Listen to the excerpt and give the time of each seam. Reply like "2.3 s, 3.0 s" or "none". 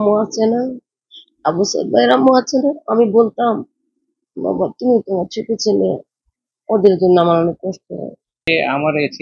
8.3 s